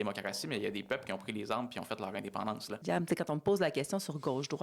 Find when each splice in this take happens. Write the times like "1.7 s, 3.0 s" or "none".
2.8 s